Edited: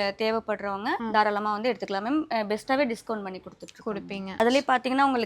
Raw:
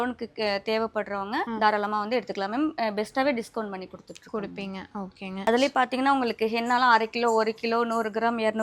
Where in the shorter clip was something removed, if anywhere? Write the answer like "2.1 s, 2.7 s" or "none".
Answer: 4.3 s